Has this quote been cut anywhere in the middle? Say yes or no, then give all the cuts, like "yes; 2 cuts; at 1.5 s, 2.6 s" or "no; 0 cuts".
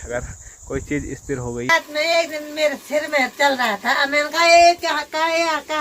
yes; 1 cut; at 1.7 s